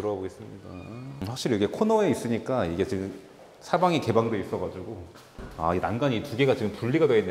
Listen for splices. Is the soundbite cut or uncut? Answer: cut